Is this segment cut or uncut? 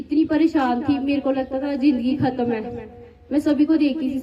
uncut